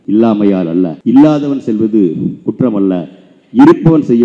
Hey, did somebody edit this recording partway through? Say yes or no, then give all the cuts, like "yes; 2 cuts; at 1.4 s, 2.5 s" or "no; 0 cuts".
yes; 1 cut; at 1.0 s